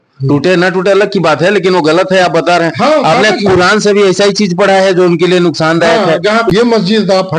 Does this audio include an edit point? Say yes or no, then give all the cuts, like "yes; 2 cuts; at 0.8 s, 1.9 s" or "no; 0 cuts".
yes; 1 cut; at 6.5 s